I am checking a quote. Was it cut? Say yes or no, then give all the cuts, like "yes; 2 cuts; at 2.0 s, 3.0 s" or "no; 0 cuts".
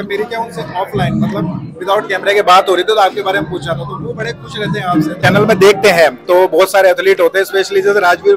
yes; 1 cut; at 5.2 s